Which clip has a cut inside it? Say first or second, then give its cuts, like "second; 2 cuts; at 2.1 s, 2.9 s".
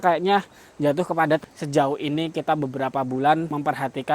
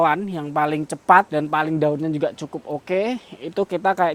first; 1 cut; at 1.4 s